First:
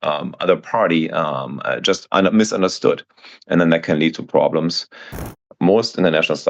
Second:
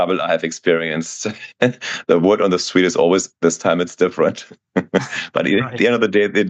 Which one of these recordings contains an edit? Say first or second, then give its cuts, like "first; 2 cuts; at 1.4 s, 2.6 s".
first; 1 cut; at 5.5 s